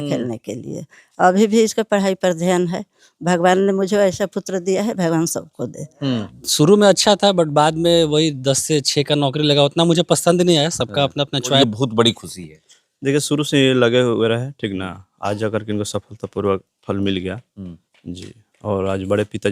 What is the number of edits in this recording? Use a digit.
2